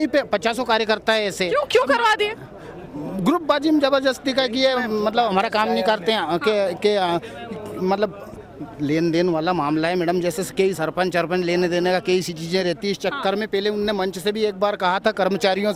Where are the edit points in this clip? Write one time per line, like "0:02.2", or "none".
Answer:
none